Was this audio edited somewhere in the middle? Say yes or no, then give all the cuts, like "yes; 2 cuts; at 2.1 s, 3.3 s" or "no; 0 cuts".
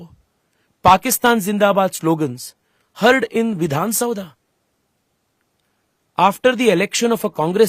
no; 0 cuts